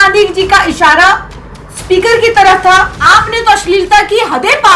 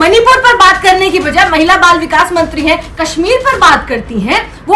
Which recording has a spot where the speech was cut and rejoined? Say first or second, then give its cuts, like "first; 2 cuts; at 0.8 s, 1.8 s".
first; 1 cut; at 3.0 s